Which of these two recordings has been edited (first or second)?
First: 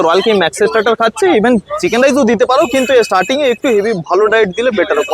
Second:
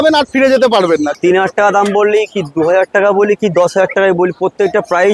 second